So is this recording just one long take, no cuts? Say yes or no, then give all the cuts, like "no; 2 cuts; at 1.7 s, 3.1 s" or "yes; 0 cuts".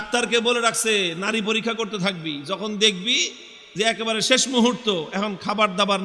yes; 0 cuts